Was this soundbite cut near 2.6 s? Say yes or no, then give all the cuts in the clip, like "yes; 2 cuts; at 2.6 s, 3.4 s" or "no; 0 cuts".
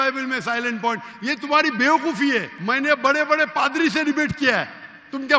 yes; 1 cut; at 2.6 s